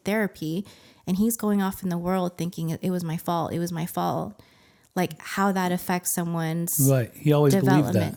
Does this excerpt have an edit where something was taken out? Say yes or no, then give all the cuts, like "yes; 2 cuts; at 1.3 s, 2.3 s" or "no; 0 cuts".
no; 0 cuts